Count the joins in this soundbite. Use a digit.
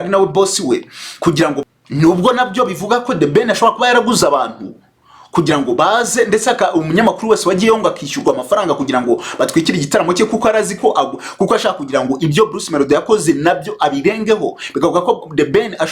1